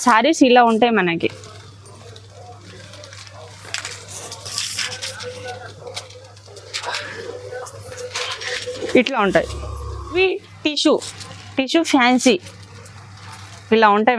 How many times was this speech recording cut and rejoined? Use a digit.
1